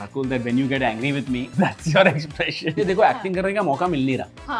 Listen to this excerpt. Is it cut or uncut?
cut